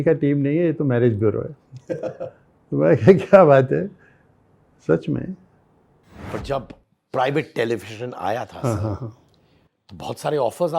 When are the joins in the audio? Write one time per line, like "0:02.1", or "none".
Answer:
0:06.2